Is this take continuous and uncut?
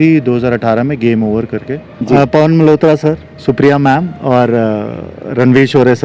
no; 1 cut; at 1.9 s

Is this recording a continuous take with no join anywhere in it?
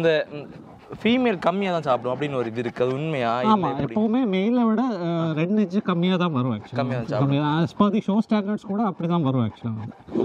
yes; 0 cuts

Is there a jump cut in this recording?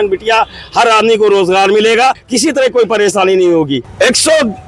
yes; 2 cuts; at 2.3 s, 3.9 s

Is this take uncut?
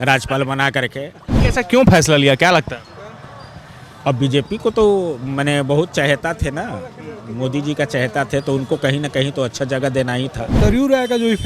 no; 2 cuts; at 1.4 s, 10.5 s

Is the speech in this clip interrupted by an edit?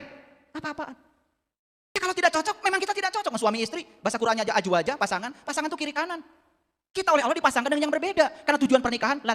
yes; 1 cut; at 2.0 s

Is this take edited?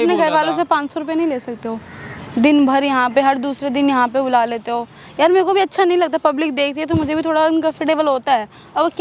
no; 0 cuts

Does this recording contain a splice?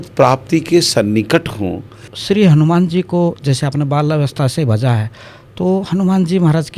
yes; 1 cut; at 2.1 s

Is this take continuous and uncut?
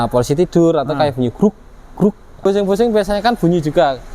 no; 1 cut; at 2.4 s

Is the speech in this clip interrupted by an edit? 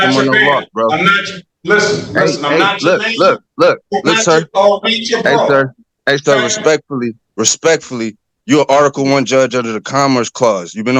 no; 0 cuts

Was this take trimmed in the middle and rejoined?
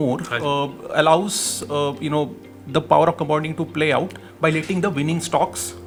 no; 0 cuts

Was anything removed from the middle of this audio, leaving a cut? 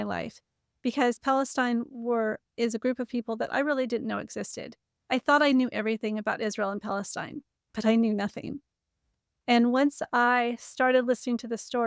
no; 0 cuts

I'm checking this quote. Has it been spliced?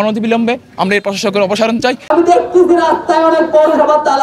yes; 1 cut; at 2.1 s

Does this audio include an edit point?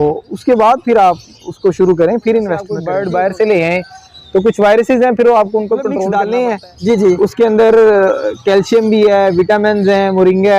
yes; 2 cuts; at 2.8 s, 6.0 s

